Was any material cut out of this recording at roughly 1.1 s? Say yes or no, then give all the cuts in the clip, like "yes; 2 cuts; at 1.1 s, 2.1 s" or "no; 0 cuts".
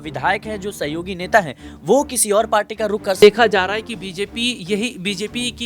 no; 1 cut; at 3.2 s